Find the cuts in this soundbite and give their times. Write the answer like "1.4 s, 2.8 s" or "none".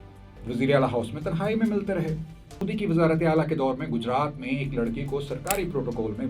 2.7 s